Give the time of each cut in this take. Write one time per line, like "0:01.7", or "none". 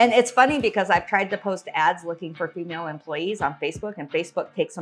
none